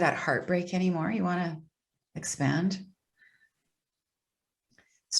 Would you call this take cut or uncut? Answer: uncut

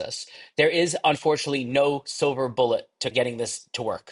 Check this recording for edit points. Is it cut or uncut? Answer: cut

